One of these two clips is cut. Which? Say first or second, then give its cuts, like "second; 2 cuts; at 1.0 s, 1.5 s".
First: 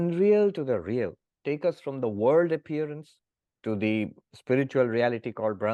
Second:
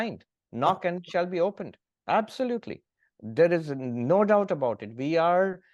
first; 1 cut; at 1.3 s